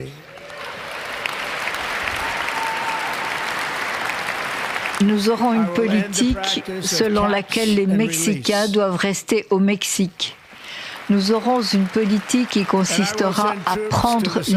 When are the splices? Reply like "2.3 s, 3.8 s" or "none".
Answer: none